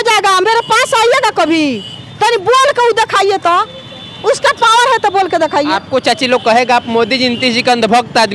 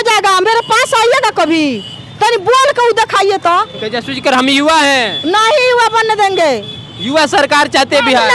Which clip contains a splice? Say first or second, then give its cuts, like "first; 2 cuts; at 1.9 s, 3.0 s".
second; 1 cut; at 3.9 s